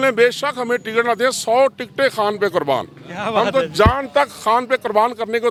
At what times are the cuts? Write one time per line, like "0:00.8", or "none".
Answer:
none